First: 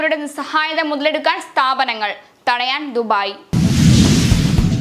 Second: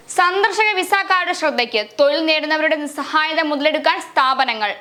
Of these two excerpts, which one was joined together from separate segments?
first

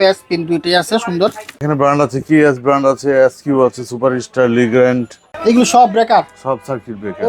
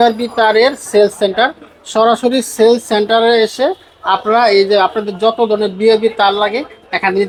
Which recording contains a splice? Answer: first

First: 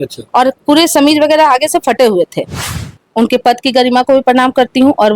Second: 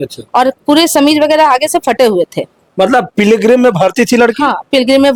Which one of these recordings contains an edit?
first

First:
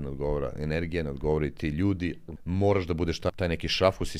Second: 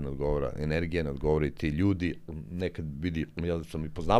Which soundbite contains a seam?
first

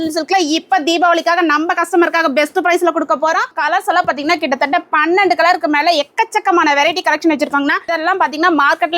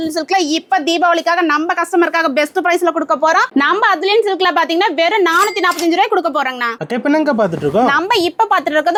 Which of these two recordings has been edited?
first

